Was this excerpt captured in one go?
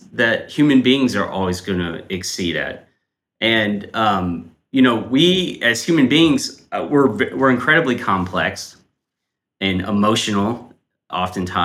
yes; 0 cuts

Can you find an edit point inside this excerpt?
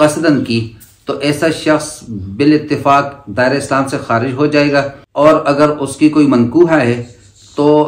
yes; 1 cut; at 5.0 s

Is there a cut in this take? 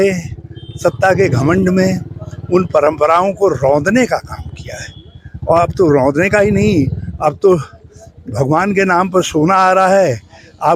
no; 0 cuts

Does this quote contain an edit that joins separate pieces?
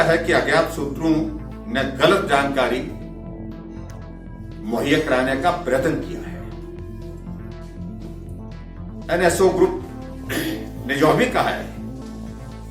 yes; 2 cuts; at 6.2 s, 9.0 s

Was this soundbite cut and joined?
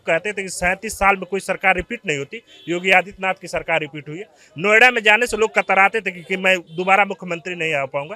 no; 0 cuts

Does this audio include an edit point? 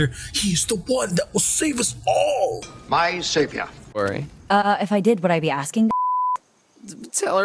no; 0 cuts

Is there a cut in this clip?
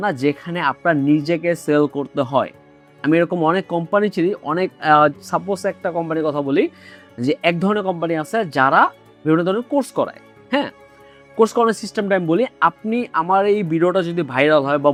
no; 0 cuts

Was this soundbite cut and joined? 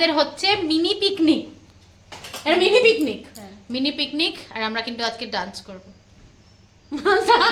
no; 0 cuts

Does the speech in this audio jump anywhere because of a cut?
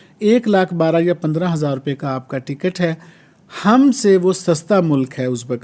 no; 0 cuts

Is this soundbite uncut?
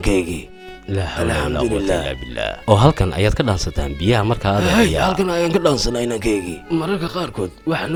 yes; 0 cuts

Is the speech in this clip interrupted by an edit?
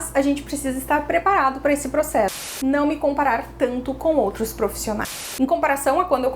yes; 2 cuts; at 2.6 s, 5.2 s

